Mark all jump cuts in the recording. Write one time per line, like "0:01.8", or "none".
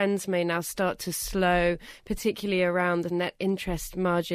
0:03.1